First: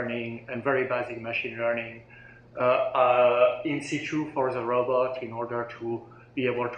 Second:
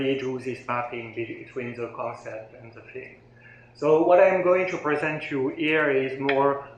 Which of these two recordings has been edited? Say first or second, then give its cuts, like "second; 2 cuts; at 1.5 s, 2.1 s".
second; 1 cut; at 4.7 s